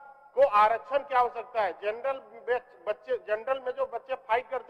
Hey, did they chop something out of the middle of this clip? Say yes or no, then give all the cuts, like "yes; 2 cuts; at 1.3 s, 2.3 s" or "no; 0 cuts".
no; 0 cuts